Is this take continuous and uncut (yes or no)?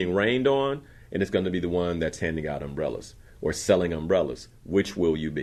yes